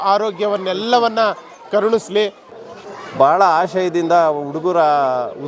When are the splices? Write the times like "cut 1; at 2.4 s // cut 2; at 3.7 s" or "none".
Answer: cut 1; at 2.5 s